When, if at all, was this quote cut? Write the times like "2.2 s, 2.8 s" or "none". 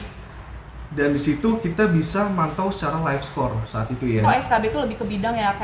4.2 s